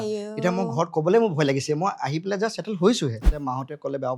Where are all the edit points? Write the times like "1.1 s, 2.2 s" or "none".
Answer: 3.3 s

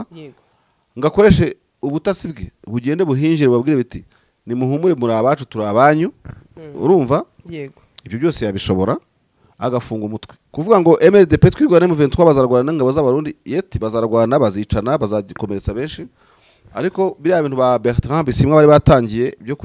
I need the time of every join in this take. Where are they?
10.4 s

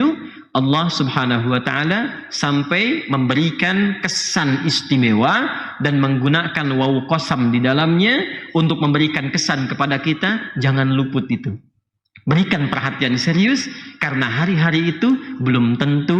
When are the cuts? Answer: none

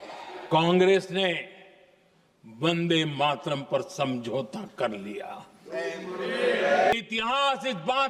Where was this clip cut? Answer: 6.9 s

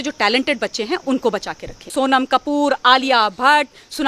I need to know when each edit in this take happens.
1.9 s

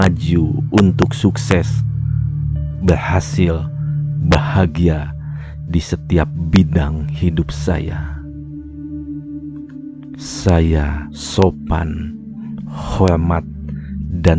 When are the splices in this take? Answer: 7.9 s, 10.4 s

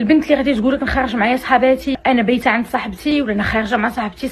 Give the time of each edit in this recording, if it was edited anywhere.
1.9 s, 3.1 s

